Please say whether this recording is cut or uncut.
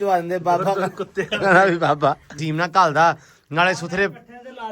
cut